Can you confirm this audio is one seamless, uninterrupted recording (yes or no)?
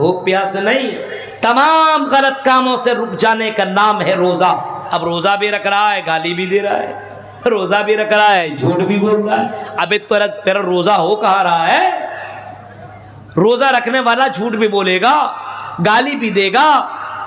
yes